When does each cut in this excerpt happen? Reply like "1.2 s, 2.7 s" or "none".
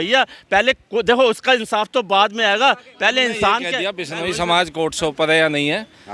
3.7 s